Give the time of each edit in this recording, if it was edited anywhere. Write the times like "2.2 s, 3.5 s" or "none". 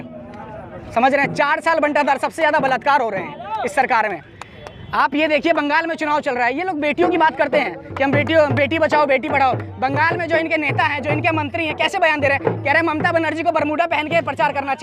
none